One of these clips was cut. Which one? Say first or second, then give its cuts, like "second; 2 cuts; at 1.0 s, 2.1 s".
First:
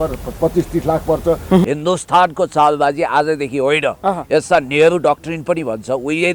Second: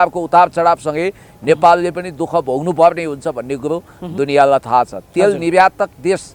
first; 1 cut; at 1.6 s